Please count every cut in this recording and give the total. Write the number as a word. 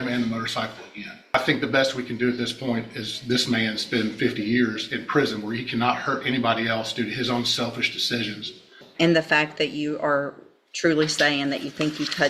two